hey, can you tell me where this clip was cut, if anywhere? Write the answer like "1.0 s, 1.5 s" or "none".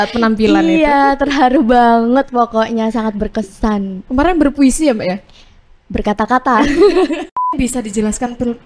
7.5 s